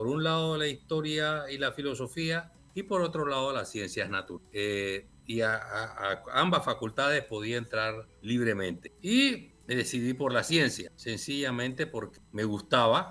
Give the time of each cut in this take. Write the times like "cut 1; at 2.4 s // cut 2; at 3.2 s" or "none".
cut 1; at 2.6 s // cut 2; at 4.3 s // cut 3; at 8.1 s // cut 4; at 8.9 s // cut 5; at 9.5 s // cut 6; at 10.9 s // cut 7; at 12.1 s